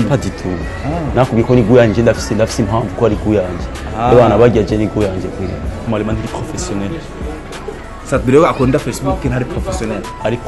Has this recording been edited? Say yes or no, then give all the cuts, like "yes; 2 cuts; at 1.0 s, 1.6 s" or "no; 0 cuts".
yes; 1 cut; at 5.8 s